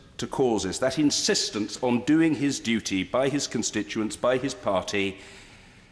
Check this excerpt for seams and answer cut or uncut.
uncut